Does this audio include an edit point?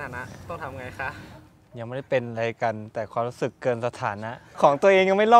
yes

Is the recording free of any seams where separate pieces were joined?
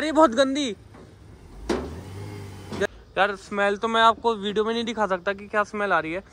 no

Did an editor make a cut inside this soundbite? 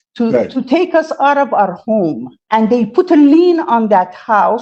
no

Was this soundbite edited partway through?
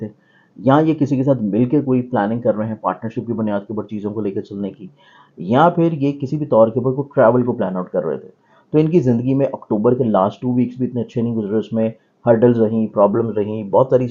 no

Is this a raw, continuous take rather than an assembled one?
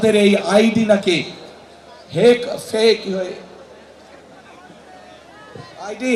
yes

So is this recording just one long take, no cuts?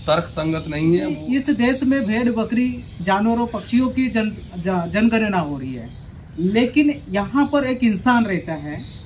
no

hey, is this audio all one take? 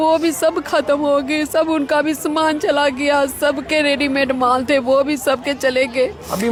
yes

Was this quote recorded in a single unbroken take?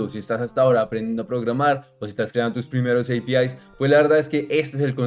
yes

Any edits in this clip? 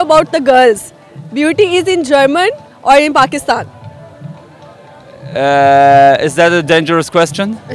no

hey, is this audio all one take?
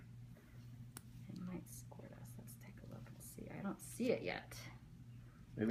yes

